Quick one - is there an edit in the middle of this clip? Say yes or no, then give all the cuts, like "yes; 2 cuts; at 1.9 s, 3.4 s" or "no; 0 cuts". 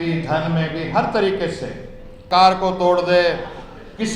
yes; 1 cut; at 2.2 s